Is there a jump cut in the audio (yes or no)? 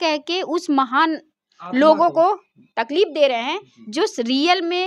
no